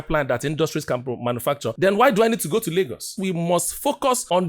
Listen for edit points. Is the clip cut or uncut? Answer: cut